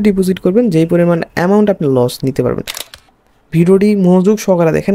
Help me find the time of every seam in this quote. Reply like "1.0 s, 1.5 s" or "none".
2.8 s